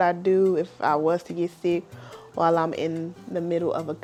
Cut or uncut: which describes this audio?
uncut